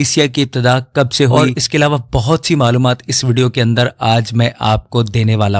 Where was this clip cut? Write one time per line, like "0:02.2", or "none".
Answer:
none